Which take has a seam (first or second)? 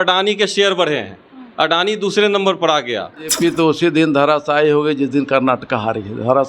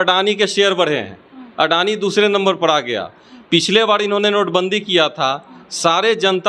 first